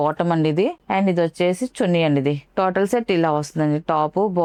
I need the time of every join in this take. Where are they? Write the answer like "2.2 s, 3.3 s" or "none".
none

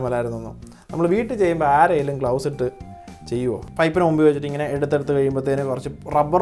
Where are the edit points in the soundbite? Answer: 3.6 s

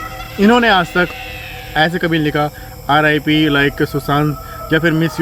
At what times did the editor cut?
none

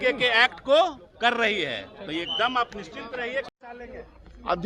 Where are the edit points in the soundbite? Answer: none

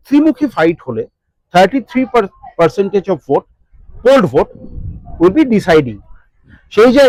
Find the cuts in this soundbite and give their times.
none

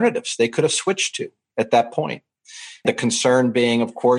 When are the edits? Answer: 2.8 s

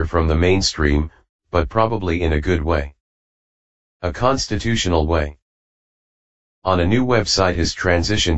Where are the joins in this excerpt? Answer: 7.1 s

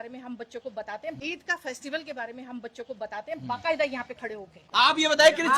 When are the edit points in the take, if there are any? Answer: 1.2 s, 3.4 s, 4.6 s

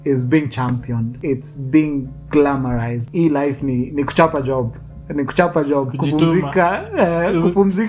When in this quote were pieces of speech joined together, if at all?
1.1 s, 3.0 s

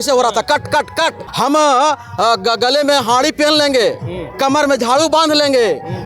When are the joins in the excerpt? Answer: 1.2 s

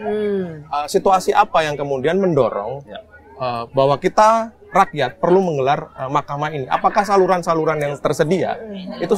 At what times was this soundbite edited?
none

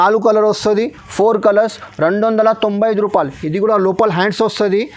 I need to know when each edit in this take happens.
none

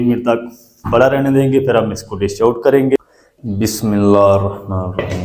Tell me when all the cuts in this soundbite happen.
3.0 s

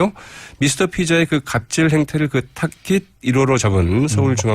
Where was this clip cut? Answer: 2.1 s

